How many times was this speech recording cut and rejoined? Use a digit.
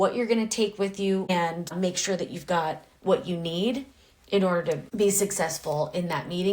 2